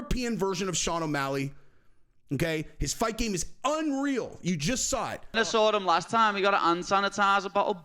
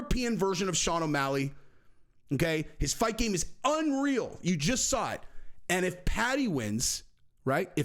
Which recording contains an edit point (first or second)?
first